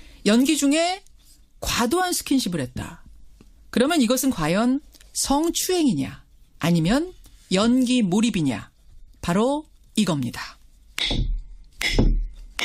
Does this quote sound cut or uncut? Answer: cut